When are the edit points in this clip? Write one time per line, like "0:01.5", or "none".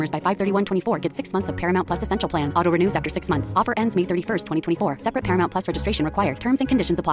none